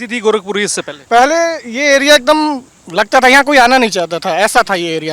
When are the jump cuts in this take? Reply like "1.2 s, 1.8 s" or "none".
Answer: 1.0 s